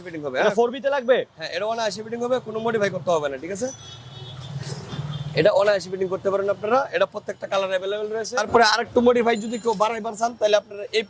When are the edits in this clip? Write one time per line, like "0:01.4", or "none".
none